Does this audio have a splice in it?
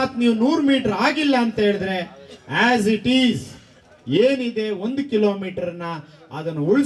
no; 0 cuts

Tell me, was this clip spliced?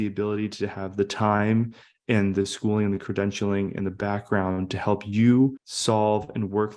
yes; 1 cut; at 5.7 s

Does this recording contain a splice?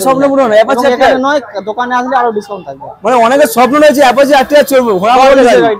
no; 0 cuts

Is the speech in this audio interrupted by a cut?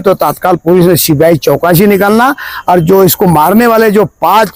no; 0 cuts

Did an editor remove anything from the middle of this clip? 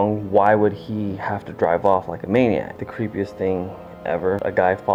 no; 0 cuts

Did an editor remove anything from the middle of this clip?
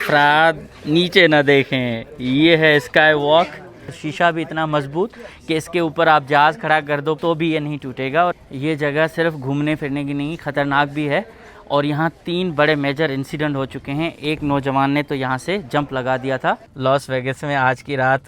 yes; 4 cuts; at 4.0 s, 7.2 s, 8.4 s, 16.7 s

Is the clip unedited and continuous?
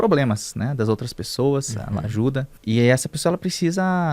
no; 1 cut; at 2.5 s

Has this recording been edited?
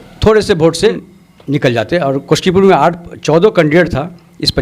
yes; 1 cut; at 1.0 s

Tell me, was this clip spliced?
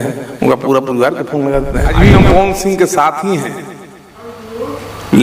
yes; 1 cut; at 1.9 s

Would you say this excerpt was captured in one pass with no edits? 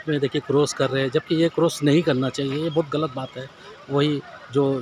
yes; 0 cuts

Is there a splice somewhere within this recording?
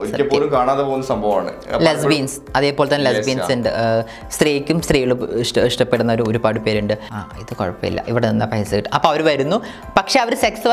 yes; 1 cut; at 7.1 s

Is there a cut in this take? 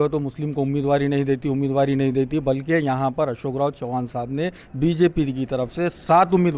no; 0 cuts

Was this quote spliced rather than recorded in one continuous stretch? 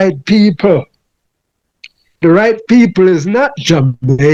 no; 0 cuts

